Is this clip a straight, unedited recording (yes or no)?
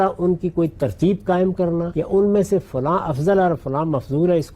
no